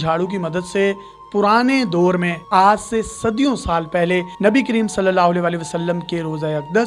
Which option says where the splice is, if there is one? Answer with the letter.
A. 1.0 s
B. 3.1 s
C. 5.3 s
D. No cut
D